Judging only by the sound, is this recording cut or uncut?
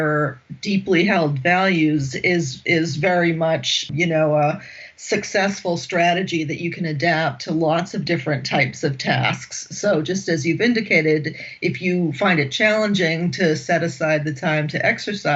cut